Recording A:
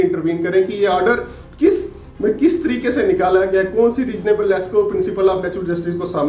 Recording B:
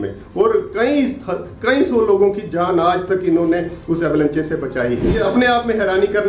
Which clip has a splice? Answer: B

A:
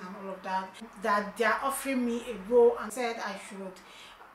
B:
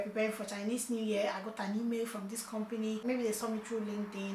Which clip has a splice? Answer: A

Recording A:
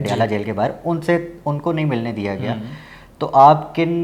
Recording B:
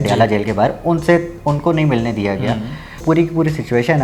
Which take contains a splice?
B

